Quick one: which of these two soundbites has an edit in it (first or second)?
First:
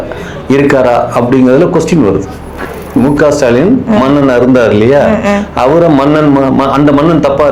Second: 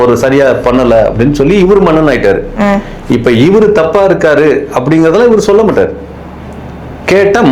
first